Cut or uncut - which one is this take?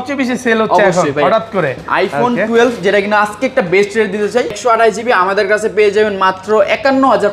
cut